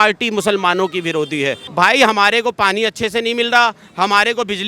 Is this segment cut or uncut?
cut